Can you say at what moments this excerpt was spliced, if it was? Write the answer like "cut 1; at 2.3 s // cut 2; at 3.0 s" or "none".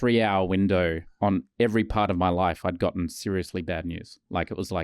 cut 1; at 1.1 s